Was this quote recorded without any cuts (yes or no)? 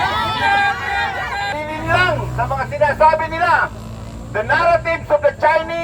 no